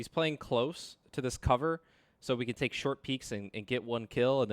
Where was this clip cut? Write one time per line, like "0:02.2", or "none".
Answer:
0:01.0

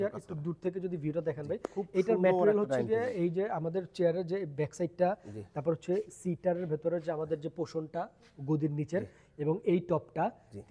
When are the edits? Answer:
none

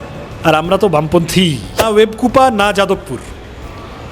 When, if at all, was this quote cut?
0:01.8

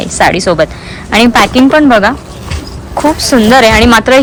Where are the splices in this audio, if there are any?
none

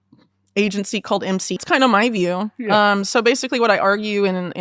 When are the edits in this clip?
0:01.7

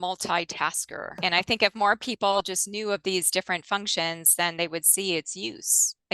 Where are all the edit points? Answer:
0:01.1

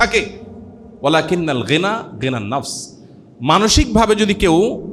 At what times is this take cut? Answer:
none

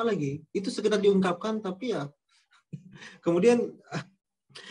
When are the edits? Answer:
none

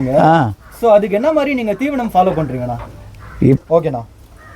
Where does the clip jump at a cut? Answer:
0:03.6

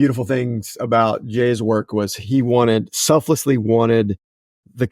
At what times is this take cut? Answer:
0:02.2

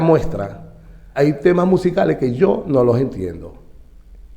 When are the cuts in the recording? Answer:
0:01.1

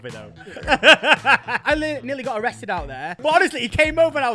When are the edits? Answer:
0:01.5
0:03.1

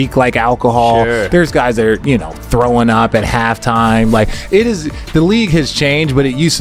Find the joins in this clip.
none

